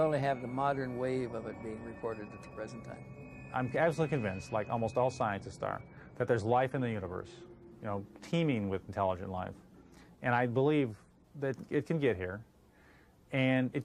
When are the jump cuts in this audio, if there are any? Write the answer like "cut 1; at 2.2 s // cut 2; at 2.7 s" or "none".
cut 1; at 2.7 s